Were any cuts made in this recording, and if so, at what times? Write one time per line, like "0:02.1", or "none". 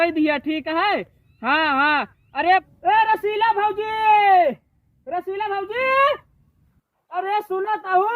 0:02.7